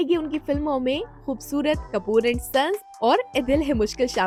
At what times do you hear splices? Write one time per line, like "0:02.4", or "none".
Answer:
none